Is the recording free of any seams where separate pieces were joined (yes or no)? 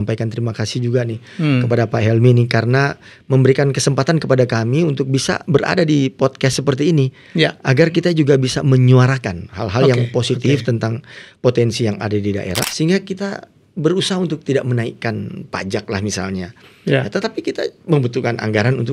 no